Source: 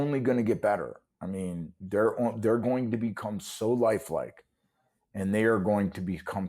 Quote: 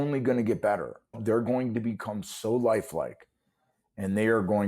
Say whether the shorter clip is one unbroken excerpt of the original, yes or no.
no